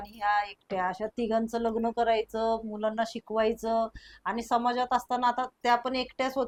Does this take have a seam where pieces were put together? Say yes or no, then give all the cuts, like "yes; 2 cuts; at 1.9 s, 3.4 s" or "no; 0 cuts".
no; 0 cuts